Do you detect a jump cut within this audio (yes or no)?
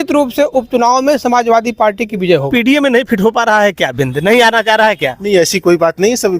yes